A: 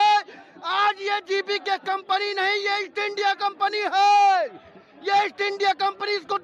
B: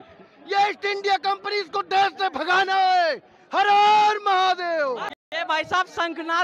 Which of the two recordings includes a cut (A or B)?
B